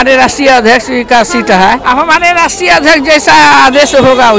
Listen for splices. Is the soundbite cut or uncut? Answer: cut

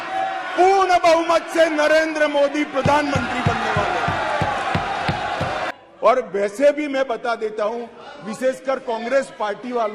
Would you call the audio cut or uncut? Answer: cut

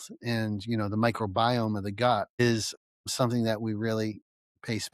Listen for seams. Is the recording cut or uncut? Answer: cut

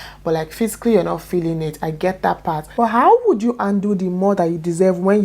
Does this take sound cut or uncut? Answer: cut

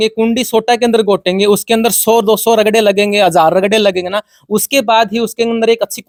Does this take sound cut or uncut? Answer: uncut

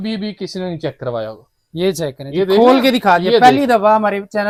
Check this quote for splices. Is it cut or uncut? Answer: uncut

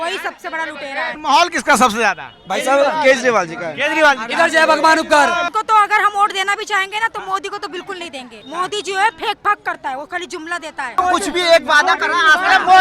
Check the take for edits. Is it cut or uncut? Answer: cut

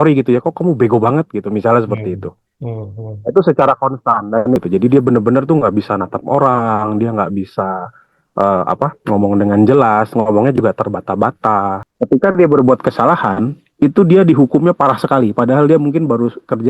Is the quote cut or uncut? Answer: cut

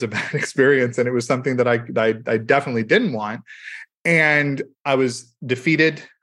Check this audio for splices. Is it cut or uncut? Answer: cut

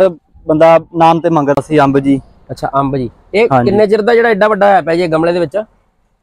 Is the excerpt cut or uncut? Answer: cut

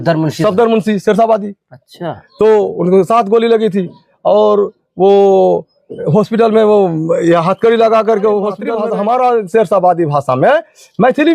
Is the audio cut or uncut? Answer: cut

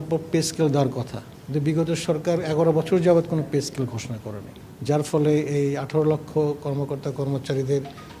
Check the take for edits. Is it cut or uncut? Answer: uncut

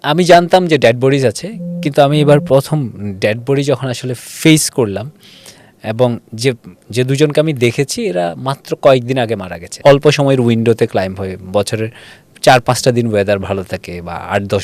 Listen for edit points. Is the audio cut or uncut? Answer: cut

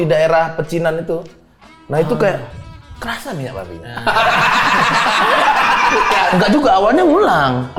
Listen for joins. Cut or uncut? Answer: cut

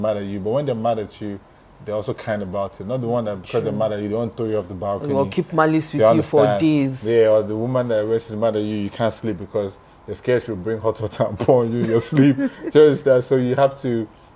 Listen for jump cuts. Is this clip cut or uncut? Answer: uncut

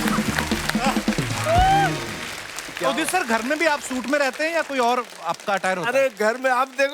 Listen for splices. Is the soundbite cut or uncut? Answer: uncut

